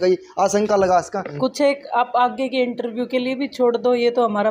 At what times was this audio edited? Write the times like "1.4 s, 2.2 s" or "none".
1.2 s